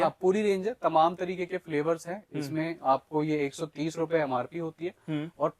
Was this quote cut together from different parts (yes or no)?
no